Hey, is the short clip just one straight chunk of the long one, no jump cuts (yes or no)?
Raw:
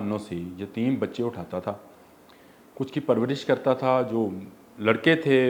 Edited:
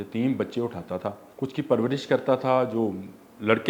no